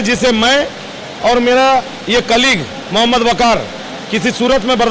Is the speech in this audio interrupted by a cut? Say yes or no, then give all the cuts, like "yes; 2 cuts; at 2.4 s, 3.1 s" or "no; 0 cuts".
no; 0 cuts